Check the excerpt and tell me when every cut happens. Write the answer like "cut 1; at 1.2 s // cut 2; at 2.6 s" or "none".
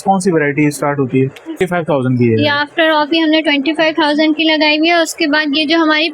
cut 1; at 1.6 s